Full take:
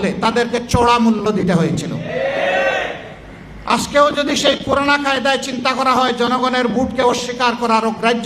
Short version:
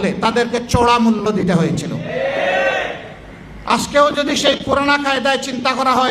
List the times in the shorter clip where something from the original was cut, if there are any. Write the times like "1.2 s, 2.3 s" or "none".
none